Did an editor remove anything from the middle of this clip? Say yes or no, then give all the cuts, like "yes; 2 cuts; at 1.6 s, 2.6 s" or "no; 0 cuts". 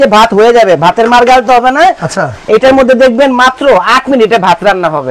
no; 0 cuts